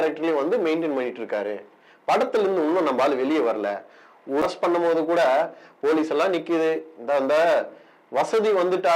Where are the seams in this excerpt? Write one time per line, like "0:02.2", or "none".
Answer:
0:04.4

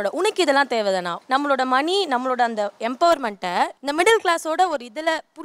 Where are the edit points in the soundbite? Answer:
0:01.1
0:03.8

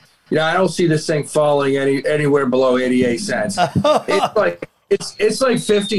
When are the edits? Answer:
none

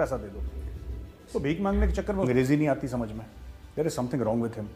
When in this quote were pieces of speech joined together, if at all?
0:02.3

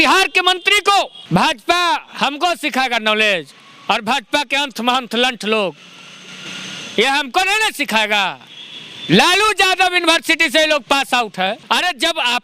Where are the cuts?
0:01.2
0:11.6

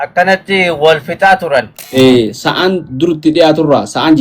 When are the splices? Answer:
0:01.8

